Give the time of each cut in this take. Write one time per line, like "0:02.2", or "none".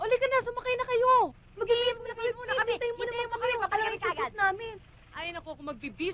none